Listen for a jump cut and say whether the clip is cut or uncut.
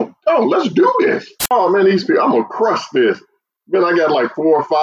cut